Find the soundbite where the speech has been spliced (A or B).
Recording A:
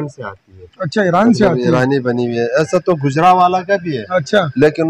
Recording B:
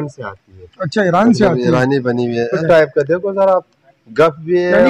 B